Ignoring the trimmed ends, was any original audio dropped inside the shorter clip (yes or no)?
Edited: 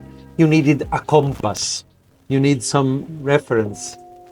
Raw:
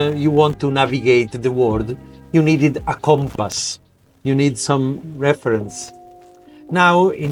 no